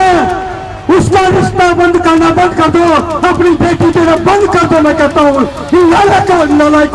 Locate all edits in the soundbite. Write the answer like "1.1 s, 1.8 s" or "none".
none